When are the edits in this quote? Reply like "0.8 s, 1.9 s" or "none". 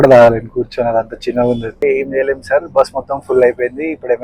1.8 s